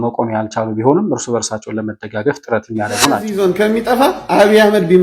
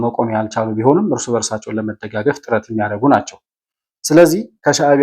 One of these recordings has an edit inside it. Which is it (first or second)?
first